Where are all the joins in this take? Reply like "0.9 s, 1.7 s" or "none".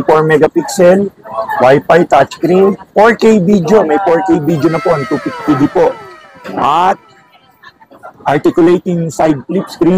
none

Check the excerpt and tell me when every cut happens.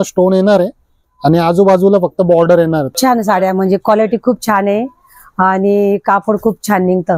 2.9 s

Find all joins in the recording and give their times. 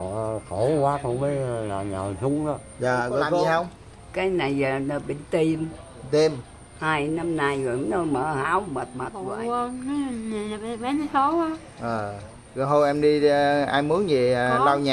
3.4 s, 9.2 s

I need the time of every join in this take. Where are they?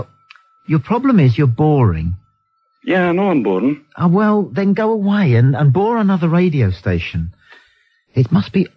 5.8 s

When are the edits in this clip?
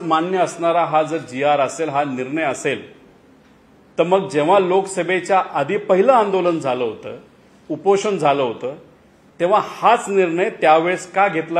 none

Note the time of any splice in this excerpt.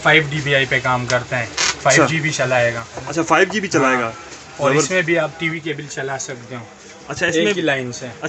none

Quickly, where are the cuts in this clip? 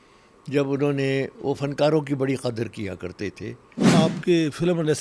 3.9 s

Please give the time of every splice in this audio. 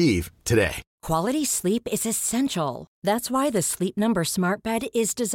0.9 s

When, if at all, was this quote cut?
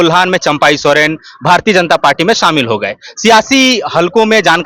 none

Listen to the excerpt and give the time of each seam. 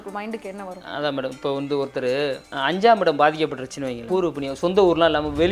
2.5 s, 4.0 s

